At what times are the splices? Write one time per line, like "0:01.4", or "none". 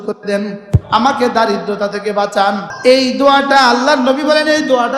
0:02.7